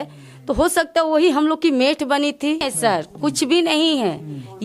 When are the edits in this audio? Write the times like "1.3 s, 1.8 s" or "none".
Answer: 2.7 s